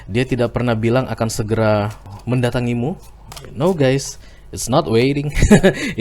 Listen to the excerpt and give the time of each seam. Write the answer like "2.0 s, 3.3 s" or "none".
2.1 s